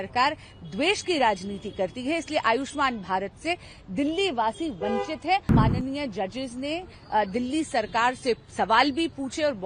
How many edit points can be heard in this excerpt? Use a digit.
1